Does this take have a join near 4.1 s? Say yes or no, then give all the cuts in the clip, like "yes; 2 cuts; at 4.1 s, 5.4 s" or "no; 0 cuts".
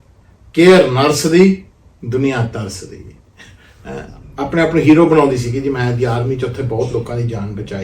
yes; 1 cut; at 4.1 s